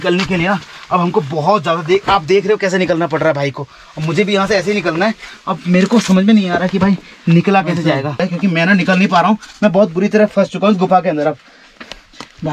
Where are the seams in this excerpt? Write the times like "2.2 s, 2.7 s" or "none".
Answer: none

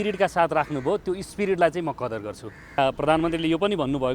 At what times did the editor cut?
2.8 s

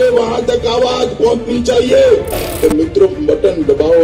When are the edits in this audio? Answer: none

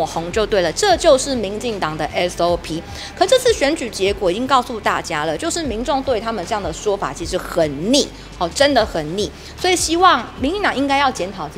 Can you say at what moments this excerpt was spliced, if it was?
none

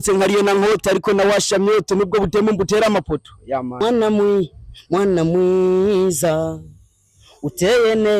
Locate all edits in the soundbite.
3.8 s

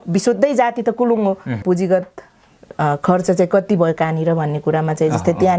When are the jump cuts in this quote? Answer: 1.6 s

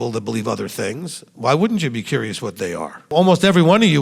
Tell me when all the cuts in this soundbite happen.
3.1 s

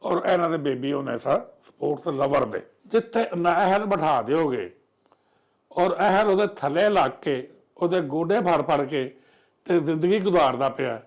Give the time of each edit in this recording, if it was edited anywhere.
2.7 s

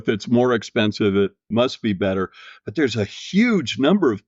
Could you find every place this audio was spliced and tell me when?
1.4 s

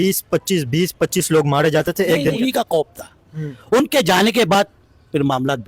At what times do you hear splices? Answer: 2.4 s

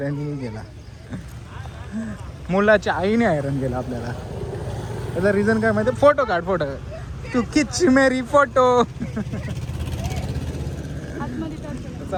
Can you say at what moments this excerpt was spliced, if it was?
none

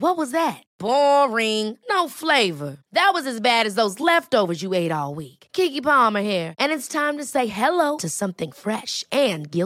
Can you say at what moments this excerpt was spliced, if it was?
none

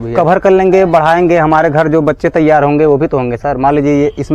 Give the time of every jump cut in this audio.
none

